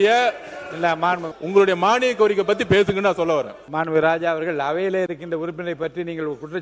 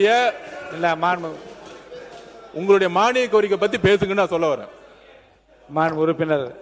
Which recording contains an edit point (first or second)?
first